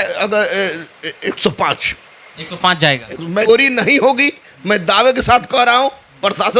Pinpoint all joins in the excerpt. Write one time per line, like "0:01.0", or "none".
0:03.5